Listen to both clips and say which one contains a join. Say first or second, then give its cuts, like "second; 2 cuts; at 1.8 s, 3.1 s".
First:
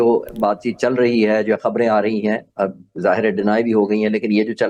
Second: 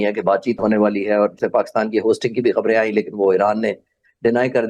second; 1 cut; at 1.3 s